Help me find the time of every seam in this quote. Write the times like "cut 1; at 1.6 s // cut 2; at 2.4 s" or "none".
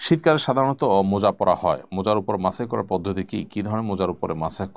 none